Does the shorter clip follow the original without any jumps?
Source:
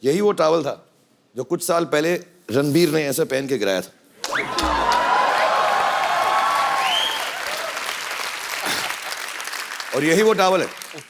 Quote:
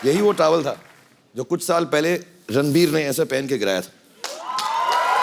yes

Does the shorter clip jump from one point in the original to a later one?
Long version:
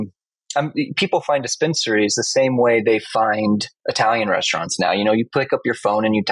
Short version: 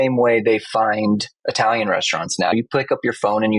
yes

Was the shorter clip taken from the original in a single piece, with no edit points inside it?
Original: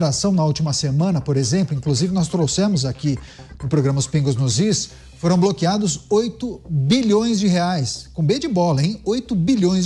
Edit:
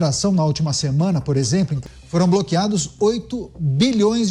no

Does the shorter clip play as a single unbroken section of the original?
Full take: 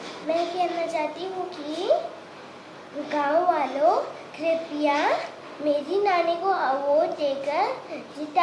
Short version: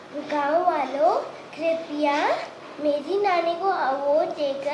yes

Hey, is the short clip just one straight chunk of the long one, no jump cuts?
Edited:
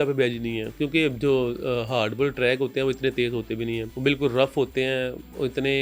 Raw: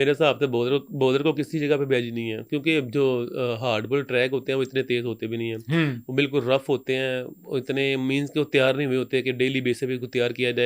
no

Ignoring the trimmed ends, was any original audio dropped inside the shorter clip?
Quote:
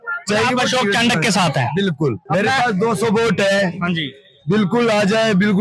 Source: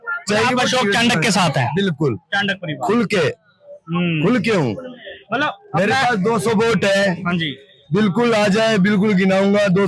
yes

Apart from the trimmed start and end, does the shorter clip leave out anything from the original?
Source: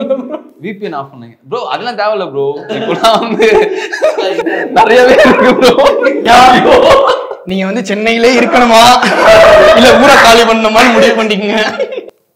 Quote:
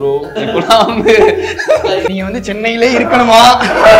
yes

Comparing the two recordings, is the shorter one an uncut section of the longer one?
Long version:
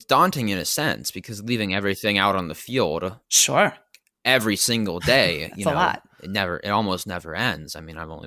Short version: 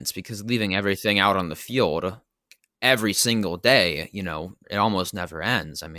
no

